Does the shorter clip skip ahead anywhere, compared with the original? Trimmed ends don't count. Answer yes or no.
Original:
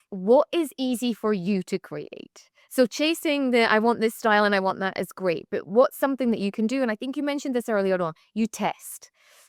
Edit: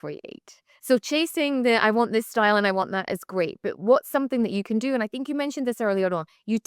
no